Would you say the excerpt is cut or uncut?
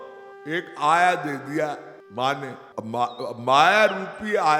cut